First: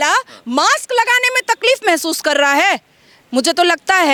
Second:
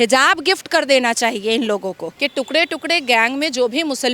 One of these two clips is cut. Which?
second; 1 cut; at 2.1 s

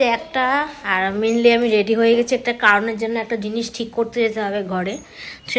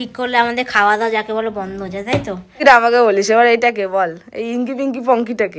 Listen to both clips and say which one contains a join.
second; 1 cut; at 2.5 s

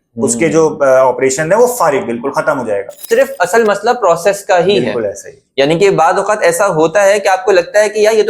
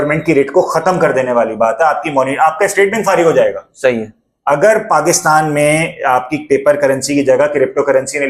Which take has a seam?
first; 1 cut; at 3.0 s

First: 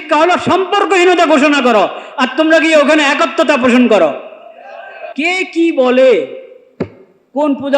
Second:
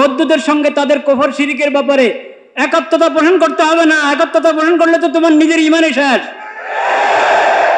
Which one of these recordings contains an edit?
first; 1 cut; at 5.0 s

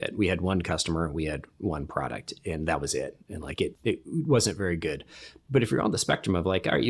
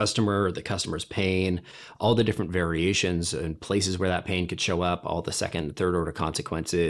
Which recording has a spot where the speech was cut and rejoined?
first; 1 cut; at 3.8 s

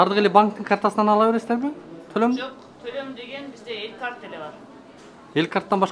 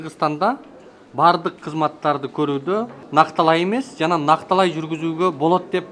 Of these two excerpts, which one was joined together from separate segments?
second; 1 cut; at 3.0 s

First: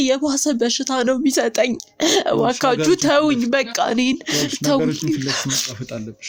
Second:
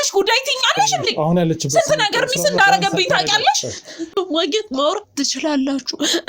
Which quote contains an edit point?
second; 1 cut; at 4.1 s

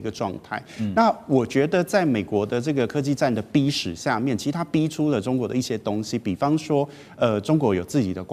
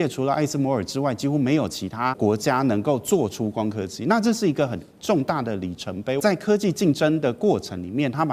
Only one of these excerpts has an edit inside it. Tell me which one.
second; 2 cuts; at 2.2 s, 6.2 s

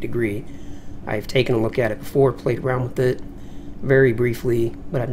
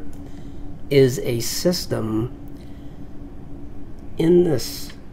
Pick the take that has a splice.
first; 1 cut; at 3.4 s

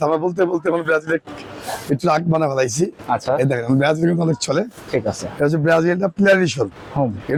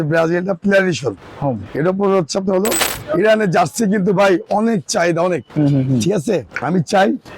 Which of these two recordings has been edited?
second; 2 cuts; at 2.9 s, 6.5 s

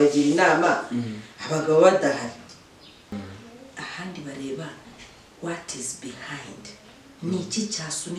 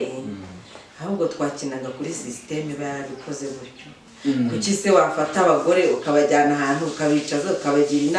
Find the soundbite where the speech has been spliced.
first; 1 cut; at 3.1 s

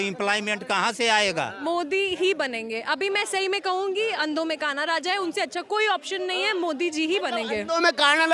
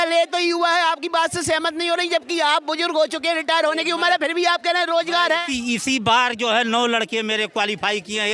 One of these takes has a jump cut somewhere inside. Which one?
first; 1 cut; at 1.6 s

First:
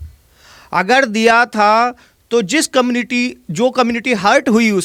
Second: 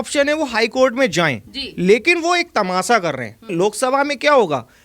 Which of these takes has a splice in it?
second; 1 cut; at 3.5 s

